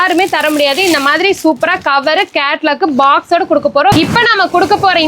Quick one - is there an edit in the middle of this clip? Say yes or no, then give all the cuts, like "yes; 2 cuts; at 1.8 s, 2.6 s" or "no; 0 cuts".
yes; 1 cut; at 3.9 s